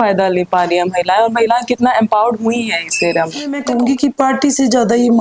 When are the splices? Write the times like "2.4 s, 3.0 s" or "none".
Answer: 3.6 s